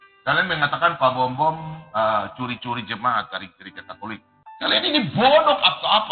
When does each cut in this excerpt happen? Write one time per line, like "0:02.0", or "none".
0:04.4